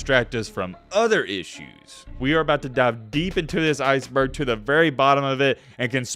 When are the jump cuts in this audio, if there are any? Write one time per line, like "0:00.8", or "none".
0:02.1